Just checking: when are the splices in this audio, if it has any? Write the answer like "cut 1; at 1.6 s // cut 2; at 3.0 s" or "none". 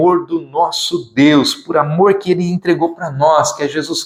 none

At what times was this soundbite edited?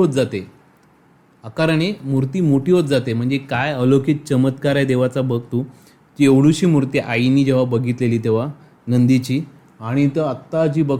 none

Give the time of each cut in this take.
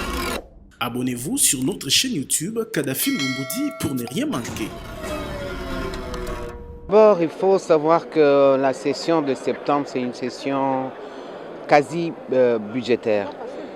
none

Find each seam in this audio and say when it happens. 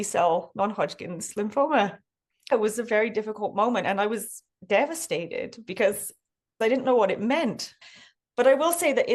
cut 1; at 2.3 s // cut 2; at 7.7 s

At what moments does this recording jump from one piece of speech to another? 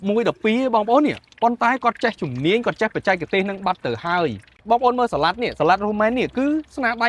cut 1; at 4.5 s

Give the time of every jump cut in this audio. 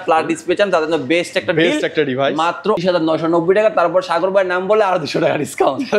cut 1; at 2.8 s

